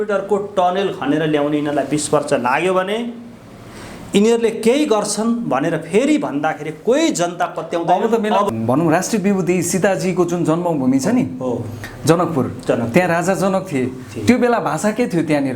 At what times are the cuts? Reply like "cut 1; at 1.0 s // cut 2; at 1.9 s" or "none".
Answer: cut 1; at 8.5 s

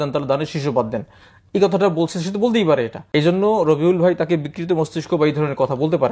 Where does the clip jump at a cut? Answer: cut 1; at 3.0 s

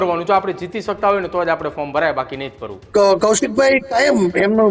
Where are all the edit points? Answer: cut 1; at 2.7 s

